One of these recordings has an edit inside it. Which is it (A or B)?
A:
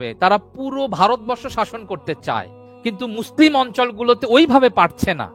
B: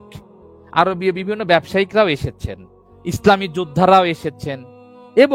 A